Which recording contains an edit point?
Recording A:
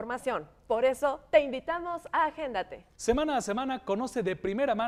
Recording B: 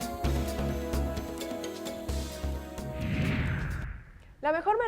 B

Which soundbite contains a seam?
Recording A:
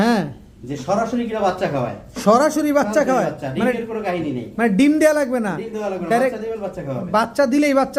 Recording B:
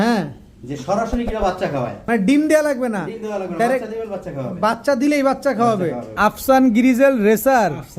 B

